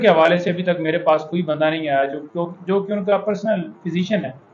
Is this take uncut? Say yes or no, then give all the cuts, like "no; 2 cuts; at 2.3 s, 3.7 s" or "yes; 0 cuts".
yes; 0 cuts